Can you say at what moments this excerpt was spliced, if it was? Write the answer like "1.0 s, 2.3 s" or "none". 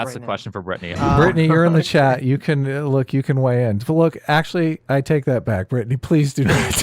0.9 s